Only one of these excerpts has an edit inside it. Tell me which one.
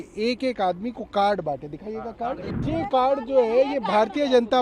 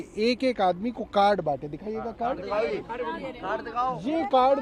first; 1 cut; at 2.5 s

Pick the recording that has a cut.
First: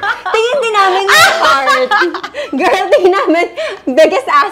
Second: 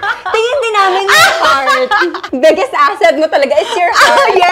second; 1 cut; at 2.2 s

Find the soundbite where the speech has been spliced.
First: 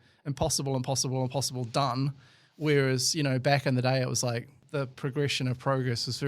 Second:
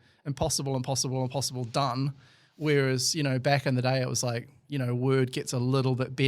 first; 1 cut; at 4.6 s

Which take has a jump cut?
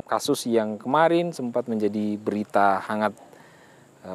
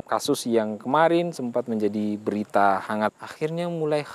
second; 1 cut; at 3.2 s

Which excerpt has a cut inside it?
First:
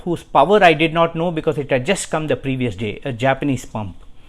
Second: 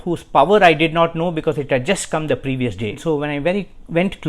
second; 1 cut; at 3.0 s

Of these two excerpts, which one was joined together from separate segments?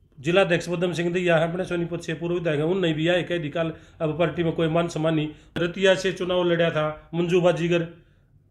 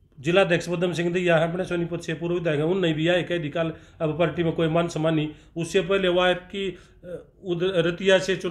first; 1 cut; at 5.6 s

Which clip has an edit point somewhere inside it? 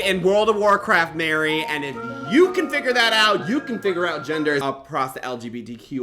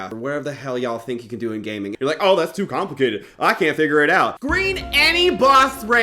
second; 2 cuts; at 1.9 s, 4.4 s

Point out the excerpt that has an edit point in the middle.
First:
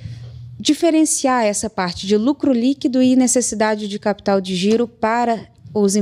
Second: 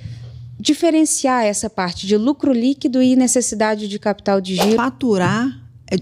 second; 1 cut; at 4.8 s

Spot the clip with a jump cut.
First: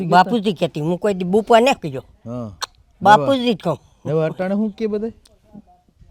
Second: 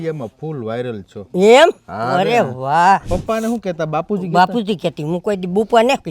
second; 1 cut; at 3.1 s

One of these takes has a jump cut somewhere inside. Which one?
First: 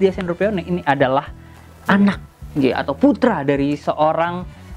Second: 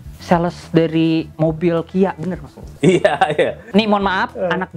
second; 1 cut; at 3.6 s

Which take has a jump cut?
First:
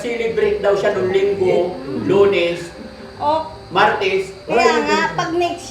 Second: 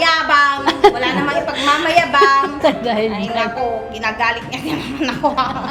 first; 1 cut; at 4.4 s

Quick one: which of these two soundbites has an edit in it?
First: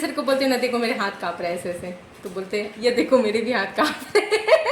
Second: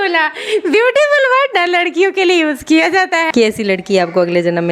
second; 1 cut; at 3.3 s

